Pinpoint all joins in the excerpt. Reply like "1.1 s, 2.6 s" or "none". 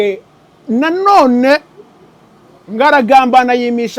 none